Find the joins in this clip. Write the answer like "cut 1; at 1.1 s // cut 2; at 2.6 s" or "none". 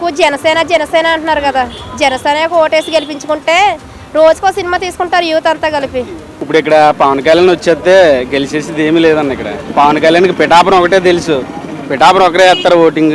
cut 1; at 6.3 s // cut 2; at 9.6 s